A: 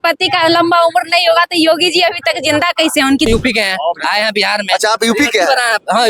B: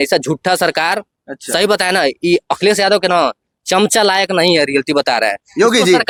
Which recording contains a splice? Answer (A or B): A